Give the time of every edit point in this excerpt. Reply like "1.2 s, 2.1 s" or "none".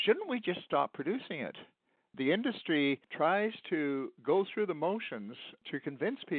2.0 s, 3.1 s